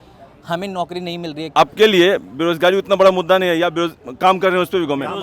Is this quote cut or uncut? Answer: cut